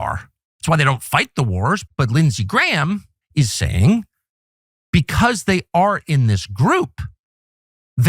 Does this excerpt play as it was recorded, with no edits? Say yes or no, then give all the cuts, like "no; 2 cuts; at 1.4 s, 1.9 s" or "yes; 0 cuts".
no; 2 cuts; at 1.8 s, 3.2 s